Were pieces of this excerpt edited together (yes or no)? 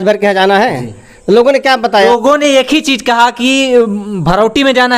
yes